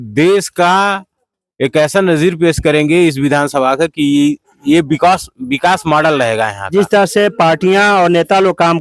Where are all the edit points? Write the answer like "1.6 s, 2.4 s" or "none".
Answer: 6.6 s